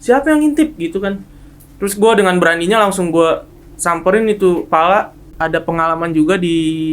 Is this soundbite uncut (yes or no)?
no